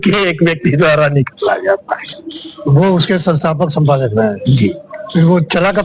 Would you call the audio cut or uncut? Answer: uncut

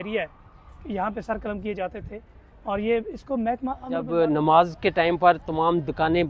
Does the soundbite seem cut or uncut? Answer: cut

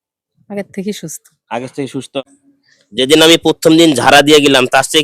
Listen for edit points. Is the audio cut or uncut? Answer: cut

